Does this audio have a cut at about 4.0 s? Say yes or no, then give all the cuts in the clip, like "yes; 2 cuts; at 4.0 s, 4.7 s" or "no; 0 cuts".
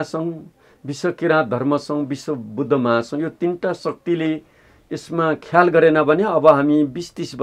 no; 0 cuts